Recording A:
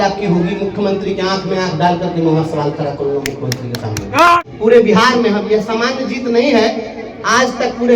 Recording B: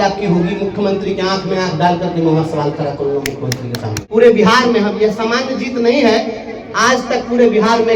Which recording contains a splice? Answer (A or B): B